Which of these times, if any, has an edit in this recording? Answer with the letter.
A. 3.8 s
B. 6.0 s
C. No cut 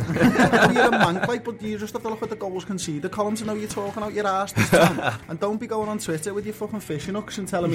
C